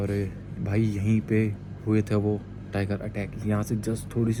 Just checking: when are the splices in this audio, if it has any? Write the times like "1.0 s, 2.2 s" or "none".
none

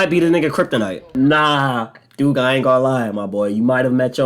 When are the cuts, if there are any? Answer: 1.0 s

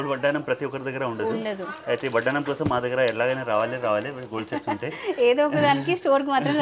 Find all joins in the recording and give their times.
none

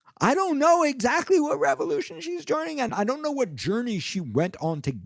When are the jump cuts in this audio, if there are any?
2.9 s

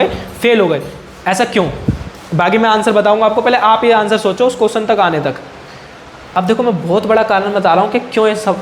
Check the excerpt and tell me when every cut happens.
6.3 s

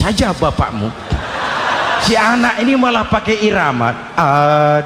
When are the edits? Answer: 2.0 s

